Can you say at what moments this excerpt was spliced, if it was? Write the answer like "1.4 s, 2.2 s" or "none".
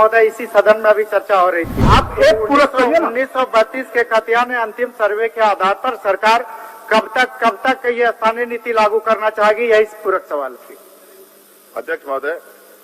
1.8 s

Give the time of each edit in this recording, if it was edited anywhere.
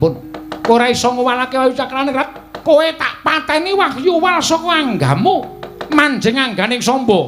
2.4 s

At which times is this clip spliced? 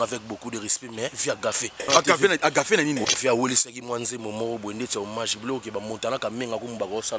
1.8 s, 3.0 s

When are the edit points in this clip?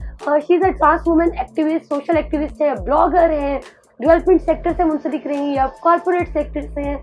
none

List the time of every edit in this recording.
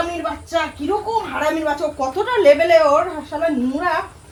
none

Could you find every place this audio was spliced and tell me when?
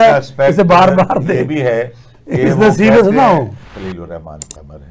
3.6 s

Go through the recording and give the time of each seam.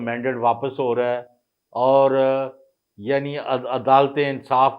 none

